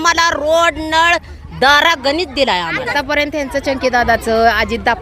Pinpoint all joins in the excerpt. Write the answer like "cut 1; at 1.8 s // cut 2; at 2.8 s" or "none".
cut 1; at 2.9 s